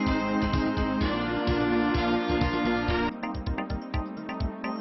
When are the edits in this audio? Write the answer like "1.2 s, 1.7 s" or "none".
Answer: none